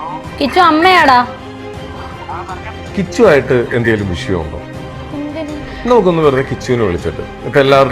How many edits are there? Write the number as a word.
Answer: zero